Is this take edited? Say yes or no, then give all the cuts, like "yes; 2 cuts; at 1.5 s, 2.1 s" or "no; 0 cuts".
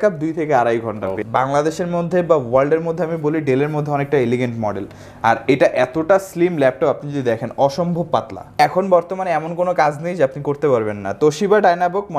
yes; 2 cuts; at 1.2 s, 8.6 s